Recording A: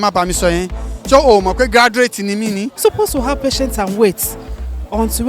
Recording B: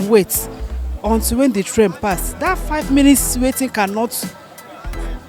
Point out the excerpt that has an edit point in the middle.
A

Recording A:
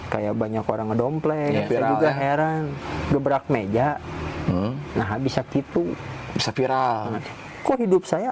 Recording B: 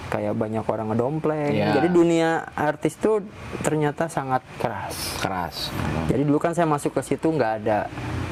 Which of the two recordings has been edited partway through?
A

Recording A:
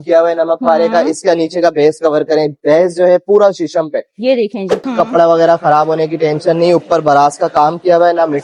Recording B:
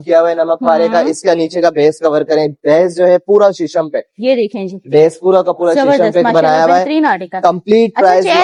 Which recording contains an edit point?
A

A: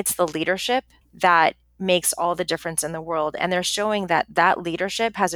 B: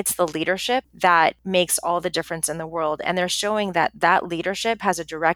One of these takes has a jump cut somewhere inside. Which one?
B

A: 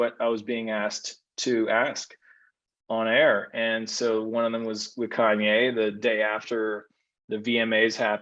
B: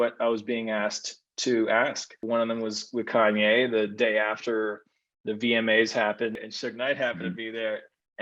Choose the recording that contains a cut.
B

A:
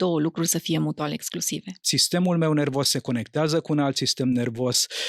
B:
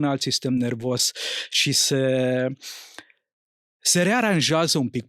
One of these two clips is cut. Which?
A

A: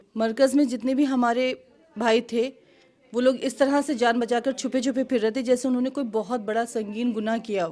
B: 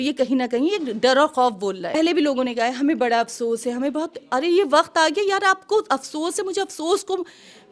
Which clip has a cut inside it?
B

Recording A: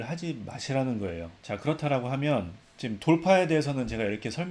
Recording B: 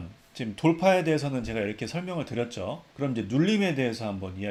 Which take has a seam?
A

